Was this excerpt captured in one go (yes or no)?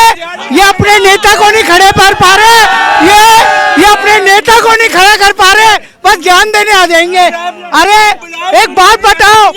yes